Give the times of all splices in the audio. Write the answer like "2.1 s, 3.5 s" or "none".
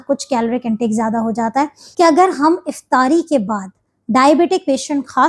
1.8 s